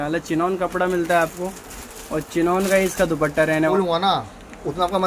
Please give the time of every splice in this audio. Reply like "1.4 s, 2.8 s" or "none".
3.7 s